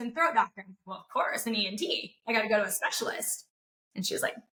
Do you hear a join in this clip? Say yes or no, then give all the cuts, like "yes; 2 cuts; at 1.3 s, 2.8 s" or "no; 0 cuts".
no; 0 cuts